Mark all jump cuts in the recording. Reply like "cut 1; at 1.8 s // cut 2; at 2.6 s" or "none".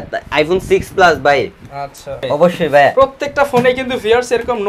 cut 1; at 2.2 s